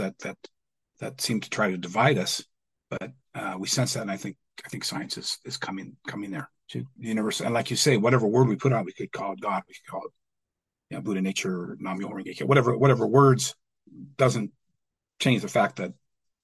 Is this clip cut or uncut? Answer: cut